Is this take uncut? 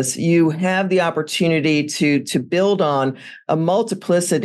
yes; 0 cuts

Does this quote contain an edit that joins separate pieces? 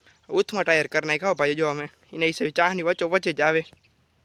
no; 0 cuts

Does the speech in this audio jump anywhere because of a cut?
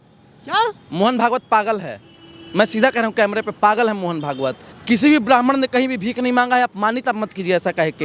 yes; 1 cut; at 4.7 s

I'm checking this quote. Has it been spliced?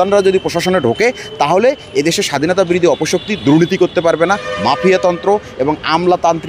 no; 0 cuts

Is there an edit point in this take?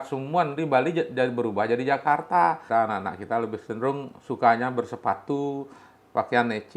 yes; 1 cut; at 2.6 s

